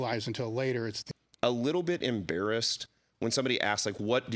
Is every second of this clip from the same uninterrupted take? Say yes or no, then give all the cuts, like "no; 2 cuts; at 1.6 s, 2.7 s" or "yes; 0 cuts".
no; 1 cut; at 1.0 s